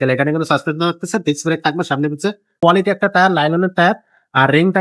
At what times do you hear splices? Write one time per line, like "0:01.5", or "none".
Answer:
0:02.5